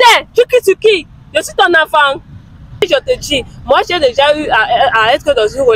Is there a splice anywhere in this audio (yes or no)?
yes